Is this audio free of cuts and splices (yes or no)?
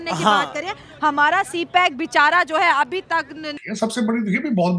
no